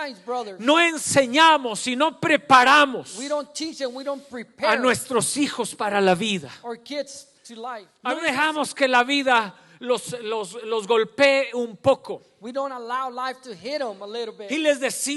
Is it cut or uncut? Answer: cut